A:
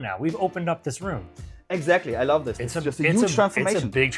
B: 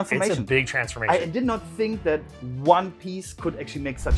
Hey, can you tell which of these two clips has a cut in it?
A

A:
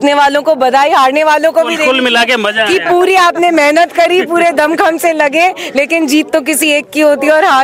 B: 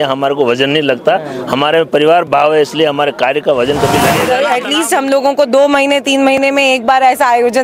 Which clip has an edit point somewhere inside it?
B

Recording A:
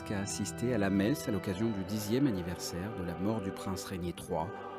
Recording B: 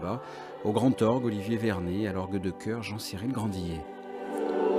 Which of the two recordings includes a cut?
A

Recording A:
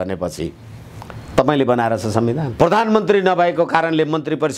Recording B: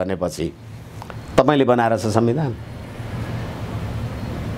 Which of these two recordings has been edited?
A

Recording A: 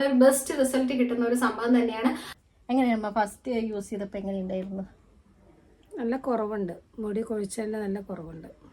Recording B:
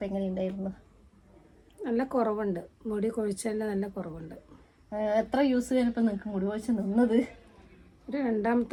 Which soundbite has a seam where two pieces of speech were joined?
A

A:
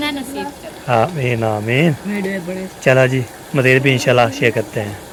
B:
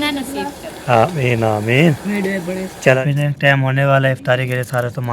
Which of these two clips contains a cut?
B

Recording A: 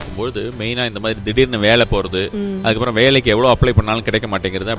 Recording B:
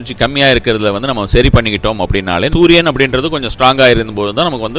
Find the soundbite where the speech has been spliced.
B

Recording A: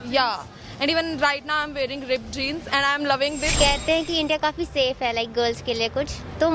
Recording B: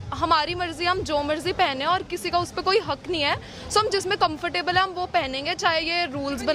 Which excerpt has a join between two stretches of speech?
A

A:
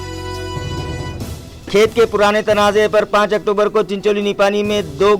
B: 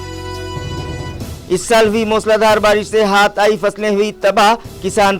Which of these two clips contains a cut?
A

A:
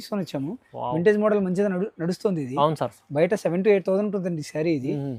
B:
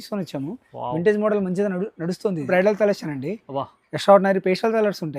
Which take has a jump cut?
B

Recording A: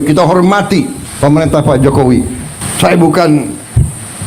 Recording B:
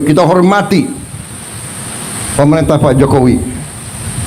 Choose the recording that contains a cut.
A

